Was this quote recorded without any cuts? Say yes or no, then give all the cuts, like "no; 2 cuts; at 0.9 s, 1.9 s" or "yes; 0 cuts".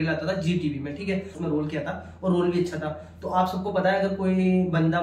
no; 1 cut; at 1.4 s